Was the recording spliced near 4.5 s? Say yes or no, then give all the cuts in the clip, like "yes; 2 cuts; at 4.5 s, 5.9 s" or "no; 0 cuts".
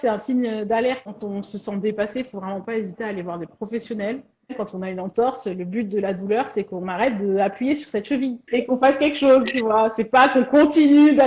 yes; 3 cuts; at 1.1 s, 4.5 s, 8.4 s